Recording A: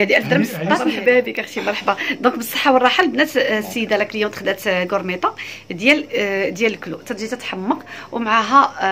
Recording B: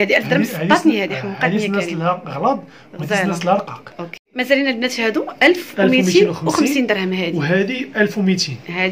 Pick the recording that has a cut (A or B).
A